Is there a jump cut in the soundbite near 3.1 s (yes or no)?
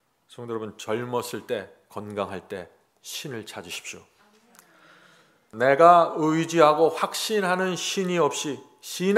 no